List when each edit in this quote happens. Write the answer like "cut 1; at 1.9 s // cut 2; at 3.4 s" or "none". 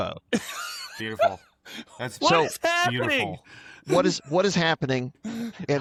none